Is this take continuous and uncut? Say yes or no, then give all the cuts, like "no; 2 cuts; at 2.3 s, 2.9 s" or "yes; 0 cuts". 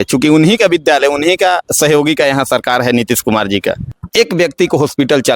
no; 1 cut; at 3.9 s